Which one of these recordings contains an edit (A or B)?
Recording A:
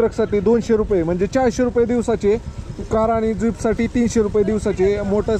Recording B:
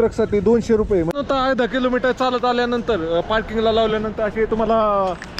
B